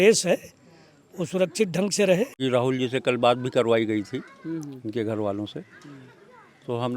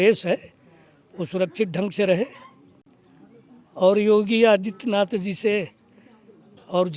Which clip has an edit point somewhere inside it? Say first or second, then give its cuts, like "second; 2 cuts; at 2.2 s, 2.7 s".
first; 1 cut; at 2.3 s